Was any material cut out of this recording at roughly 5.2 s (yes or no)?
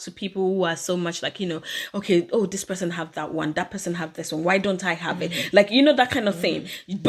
no